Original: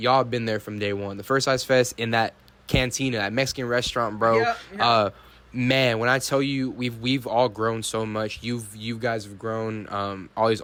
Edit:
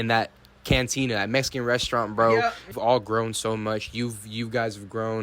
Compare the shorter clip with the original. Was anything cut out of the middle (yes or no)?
yes